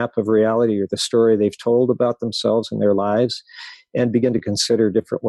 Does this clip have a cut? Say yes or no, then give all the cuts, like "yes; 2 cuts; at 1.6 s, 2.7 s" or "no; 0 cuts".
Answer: no; 0 cuts